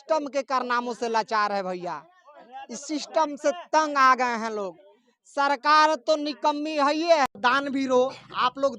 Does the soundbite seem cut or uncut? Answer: cut